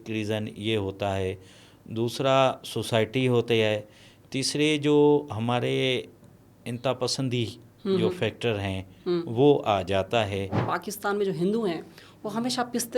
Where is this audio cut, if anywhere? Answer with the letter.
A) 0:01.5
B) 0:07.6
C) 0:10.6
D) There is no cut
C